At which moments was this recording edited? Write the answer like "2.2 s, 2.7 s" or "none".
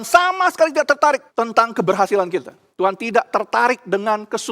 1.3 s, 2.6 s